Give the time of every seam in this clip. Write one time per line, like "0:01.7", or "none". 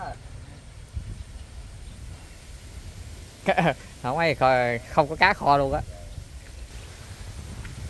0:06.7